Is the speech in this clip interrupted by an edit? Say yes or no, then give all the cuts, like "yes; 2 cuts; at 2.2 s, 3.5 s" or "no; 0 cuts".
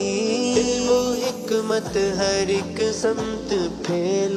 no; 0 cuts